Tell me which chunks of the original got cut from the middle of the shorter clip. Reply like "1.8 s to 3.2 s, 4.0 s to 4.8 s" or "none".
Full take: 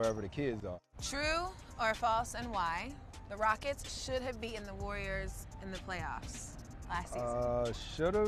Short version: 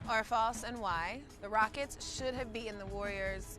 3.0 s to 3.2 s